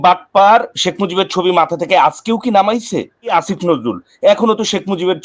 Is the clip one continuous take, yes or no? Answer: no